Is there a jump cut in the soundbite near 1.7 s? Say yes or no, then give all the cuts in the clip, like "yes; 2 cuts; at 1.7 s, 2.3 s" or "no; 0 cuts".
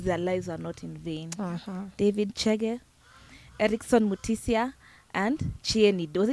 no; 0 cuts